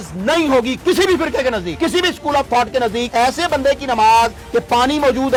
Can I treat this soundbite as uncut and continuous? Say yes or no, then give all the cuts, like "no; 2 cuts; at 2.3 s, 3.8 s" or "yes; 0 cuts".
yes; 0 cuts